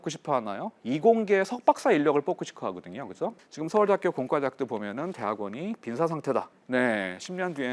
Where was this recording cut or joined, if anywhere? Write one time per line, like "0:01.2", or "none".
0:03.4
0:06.6